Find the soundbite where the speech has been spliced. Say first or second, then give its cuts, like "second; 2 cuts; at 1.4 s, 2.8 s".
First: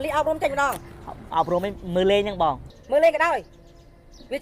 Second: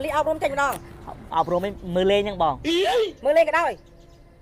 first; 1 cut; at 2.7 s